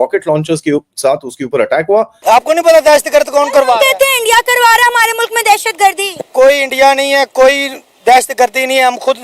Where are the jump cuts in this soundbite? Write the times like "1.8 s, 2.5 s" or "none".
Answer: 2.1 s